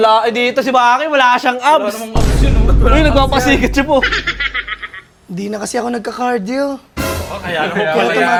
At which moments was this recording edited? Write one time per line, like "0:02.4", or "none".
none